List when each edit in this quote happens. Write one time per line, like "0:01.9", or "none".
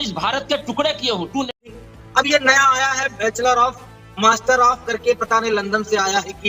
0:01.7